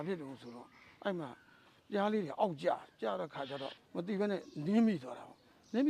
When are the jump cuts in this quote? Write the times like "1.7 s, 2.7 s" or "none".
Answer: 3.8 s